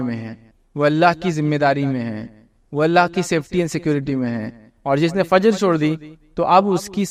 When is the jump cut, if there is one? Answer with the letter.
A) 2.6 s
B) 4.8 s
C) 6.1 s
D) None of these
D